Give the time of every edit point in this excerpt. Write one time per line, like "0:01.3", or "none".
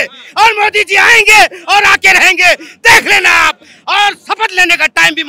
none

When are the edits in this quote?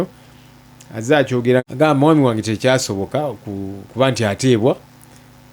0:01.6

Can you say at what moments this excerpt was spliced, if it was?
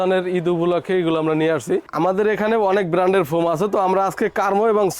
0:01.8

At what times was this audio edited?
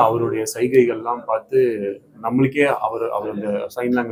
none

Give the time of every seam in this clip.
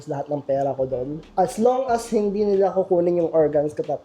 0:01.2

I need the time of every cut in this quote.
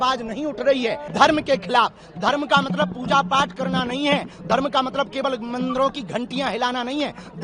0:01.0

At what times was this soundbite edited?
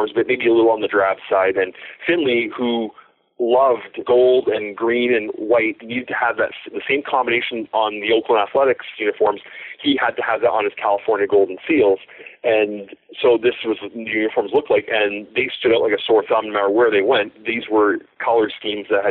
0:03.9
0:05.8

